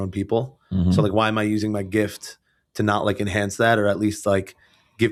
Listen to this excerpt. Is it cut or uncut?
uncut